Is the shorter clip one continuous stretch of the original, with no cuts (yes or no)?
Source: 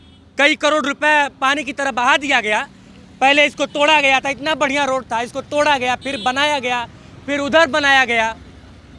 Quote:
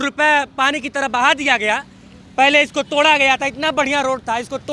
yes